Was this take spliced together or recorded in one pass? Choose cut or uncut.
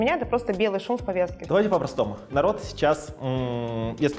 cut